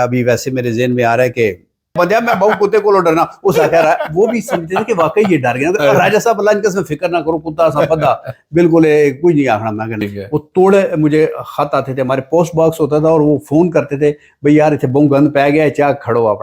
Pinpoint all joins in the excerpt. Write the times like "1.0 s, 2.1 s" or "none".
2.0 s, 10.0 s

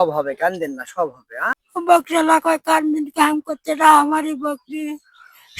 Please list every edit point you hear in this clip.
1.6 s

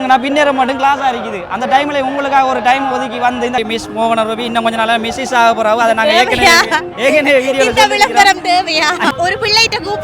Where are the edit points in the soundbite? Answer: 3.6 s, 9.1 s

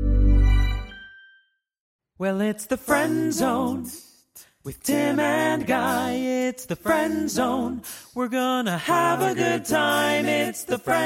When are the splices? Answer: 2.0 s

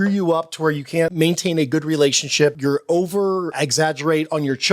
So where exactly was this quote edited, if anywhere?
1.1 s, 2.6 s, 3.5 s

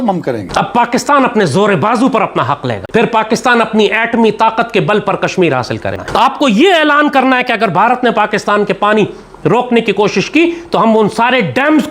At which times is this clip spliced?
2.9 s, 5.9 s

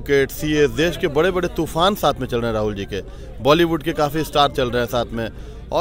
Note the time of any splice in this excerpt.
none

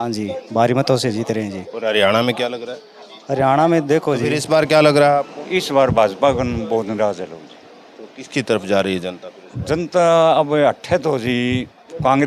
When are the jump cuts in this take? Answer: 4.3 s

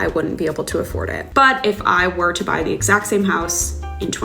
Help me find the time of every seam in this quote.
1.2 s

